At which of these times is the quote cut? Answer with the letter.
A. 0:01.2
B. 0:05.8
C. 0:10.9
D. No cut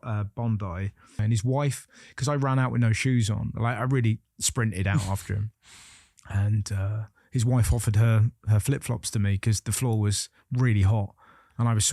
A